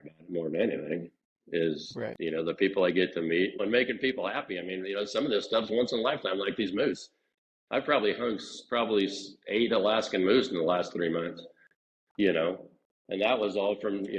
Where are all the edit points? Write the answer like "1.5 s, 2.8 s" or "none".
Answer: 3.6 s